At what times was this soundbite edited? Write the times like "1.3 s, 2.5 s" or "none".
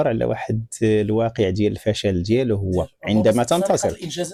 none